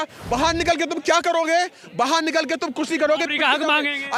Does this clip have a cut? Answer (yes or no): no